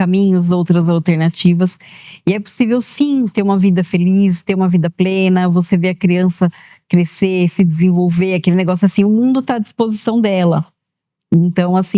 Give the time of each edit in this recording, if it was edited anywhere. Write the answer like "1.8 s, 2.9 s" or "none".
none